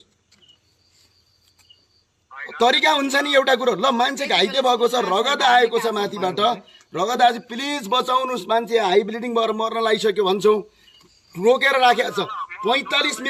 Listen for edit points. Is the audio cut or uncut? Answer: uncut